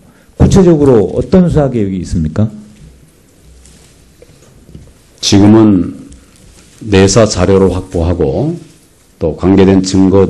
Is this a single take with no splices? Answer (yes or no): no